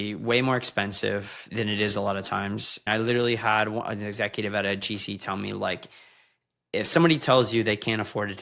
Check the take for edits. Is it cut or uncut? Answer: cut